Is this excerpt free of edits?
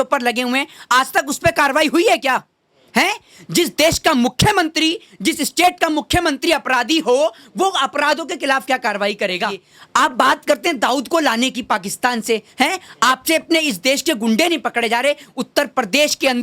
no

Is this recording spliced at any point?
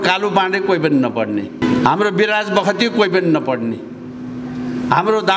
yes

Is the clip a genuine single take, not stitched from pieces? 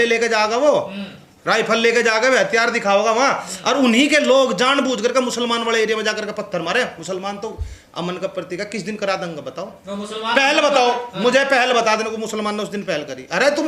yes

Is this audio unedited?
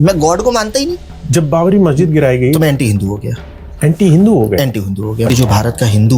no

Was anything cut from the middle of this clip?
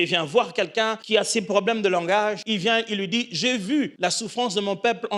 yes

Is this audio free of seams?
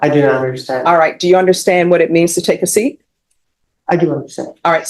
yes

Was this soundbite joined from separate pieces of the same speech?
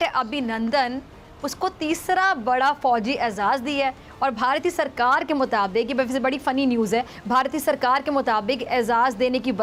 no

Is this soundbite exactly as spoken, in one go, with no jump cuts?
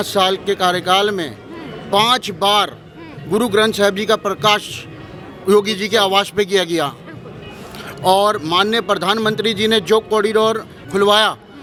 yes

